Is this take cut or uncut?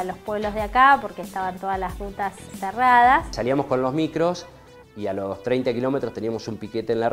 cut